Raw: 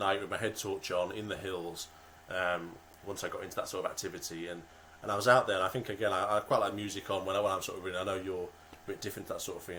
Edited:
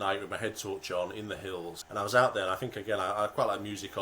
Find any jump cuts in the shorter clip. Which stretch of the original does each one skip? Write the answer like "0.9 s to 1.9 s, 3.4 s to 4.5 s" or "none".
1.8 s to 4.9 s